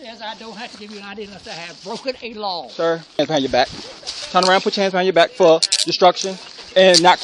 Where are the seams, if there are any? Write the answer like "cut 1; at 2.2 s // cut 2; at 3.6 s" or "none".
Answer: cut 1; at 3.2 s